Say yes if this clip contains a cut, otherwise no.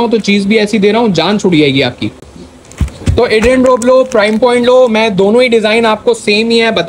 no